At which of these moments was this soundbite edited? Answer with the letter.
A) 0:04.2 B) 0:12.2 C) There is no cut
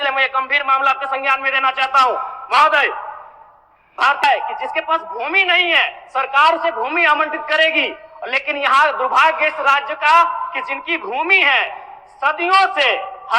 A